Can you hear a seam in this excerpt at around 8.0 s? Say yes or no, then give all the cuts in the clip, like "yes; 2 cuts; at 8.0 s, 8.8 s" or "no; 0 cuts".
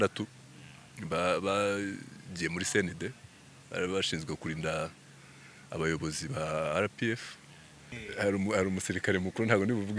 yes; 1 cut; at 8.0 s